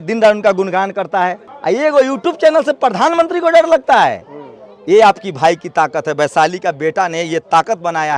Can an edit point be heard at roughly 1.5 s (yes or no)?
yes